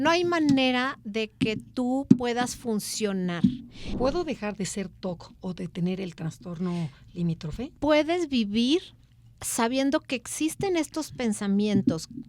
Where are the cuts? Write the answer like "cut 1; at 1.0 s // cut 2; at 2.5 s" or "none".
cut 1; at 3.8 s // cut 2; at 7.6 s